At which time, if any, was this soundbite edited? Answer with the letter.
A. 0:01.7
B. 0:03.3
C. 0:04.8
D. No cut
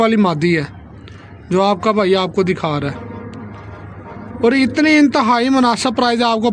D